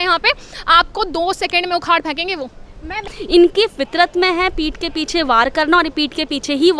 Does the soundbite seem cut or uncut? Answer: cut